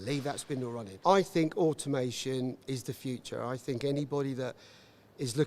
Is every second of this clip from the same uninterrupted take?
no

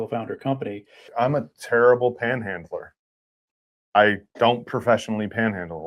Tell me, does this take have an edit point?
yes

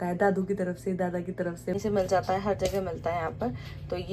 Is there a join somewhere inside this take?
yes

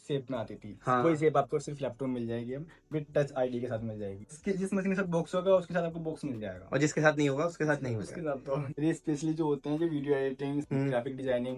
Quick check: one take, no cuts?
no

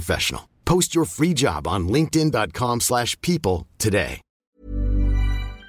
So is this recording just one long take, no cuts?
no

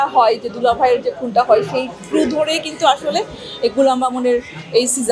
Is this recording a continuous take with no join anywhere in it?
yes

